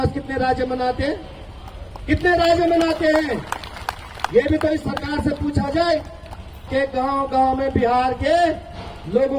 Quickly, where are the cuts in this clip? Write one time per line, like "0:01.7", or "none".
0:06.7

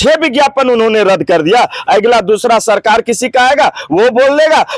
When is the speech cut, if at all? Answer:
none

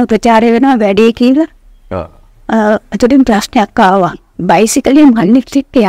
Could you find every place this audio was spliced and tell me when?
0:04.3

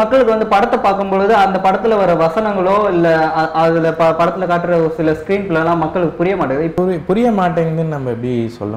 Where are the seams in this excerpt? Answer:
0:06.7

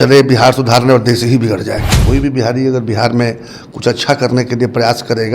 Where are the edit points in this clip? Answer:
0:01.9

